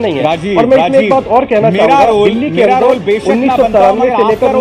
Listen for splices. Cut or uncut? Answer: uncut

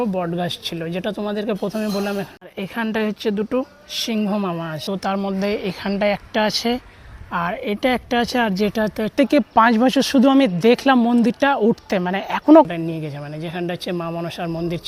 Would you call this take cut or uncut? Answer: cut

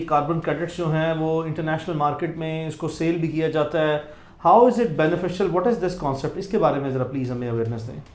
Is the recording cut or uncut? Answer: uncut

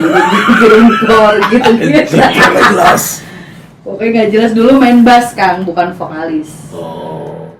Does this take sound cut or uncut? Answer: uncut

